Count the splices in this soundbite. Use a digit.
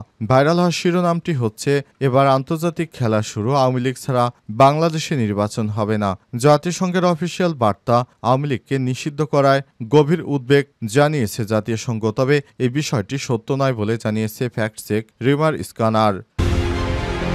1